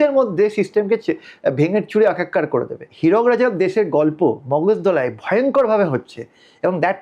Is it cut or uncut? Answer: cut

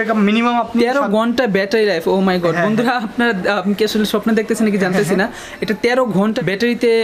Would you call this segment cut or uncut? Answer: uncut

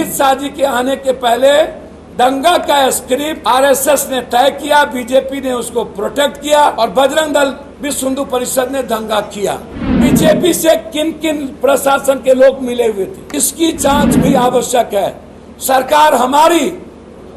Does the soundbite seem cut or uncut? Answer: cut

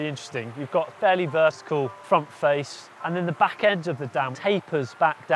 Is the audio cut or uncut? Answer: cut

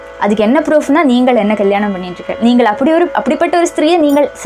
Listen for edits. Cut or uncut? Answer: uncut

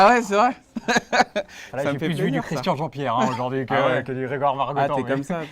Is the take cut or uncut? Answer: cut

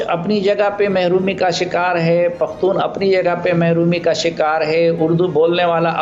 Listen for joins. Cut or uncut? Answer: uncut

